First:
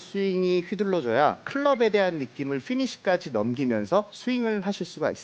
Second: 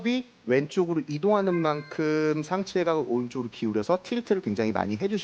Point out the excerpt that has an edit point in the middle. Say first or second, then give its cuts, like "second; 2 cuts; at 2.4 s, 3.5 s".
first; 2 cuts; at 1.4 s, 4.1 s